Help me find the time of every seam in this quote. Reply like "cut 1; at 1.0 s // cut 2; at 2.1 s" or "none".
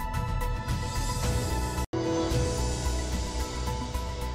cut 1; at 1.9 s // cut 2; at 3.2 s